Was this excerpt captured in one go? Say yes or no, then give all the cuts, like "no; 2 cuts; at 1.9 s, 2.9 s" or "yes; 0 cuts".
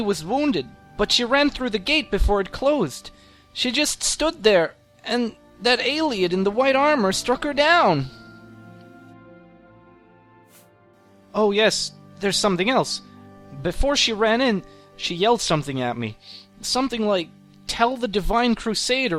yes; 0 cuts